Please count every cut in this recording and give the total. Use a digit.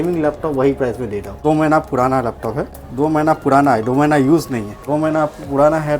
3